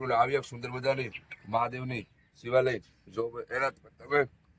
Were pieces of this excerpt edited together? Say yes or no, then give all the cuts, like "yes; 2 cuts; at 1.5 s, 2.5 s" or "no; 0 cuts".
no; 0 cuts